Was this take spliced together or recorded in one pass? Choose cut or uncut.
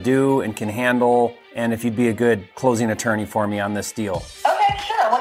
cut